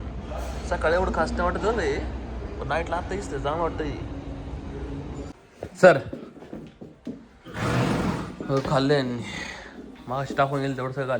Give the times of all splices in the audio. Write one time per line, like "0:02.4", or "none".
0:05.3